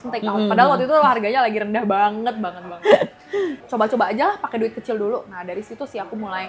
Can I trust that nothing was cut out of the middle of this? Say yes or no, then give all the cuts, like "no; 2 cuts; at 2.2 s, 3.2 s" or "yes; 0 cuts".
no; 1 cut; at 3.6 s